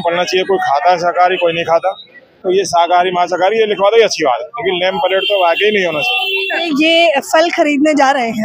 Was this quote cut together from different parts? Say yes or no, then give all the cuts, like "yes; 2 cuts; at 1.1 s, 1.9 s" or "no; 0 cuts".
yes; 1 cut; at 6.6 s